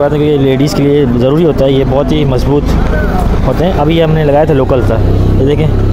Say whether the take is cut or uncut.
uncut